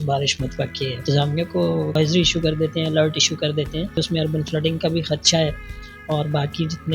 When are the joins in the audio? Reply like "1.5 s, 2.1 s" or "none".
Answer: 1.0 s